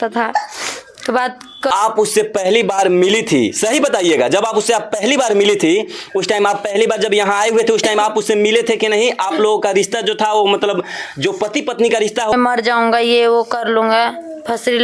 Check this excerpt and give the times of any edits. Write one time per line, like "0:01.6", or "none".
0:01.7
0:12.3